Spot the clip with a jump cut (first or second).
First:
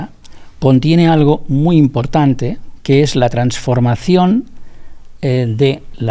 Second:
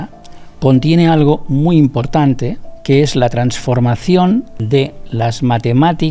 second